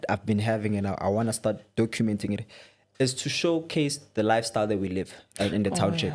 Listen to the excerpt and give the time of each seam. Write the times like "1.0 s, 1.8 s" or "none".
none

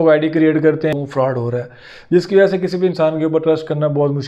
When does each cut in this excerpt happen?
0.9 s

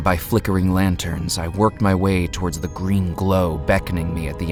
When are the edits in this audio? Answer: none

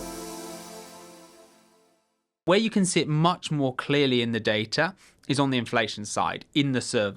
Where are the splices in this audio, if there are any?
2.4 s

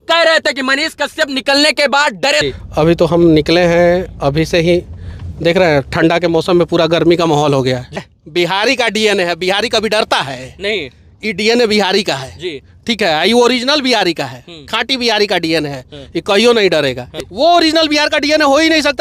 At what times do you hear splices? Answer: 2.4 s, 8.0 s, 17.1 s

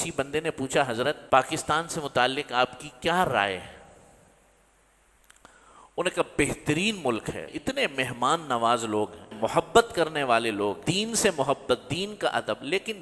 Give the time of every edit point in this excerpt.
1.2 s, 7.4 s, 9.3 s, 10.8 s

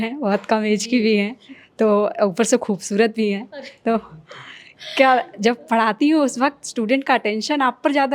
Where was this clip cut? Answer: none

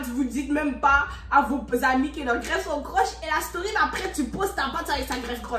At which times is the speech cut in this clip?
none

